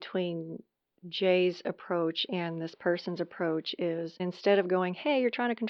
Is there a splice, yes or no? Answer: yes